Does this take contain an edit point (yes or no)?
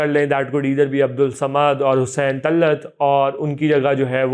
no